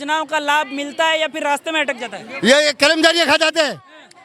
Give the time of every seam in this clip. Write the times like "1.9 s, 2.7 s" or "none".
none